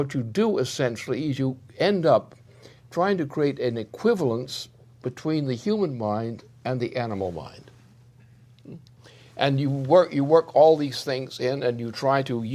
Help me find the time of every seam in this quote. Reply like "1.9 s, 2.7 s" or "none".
5.6 s